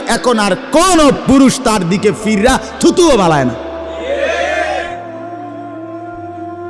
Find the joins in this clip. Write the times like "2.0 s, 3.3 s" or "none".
none